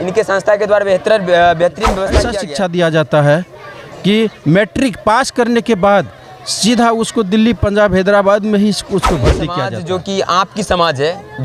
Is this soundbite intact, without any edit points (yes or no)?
no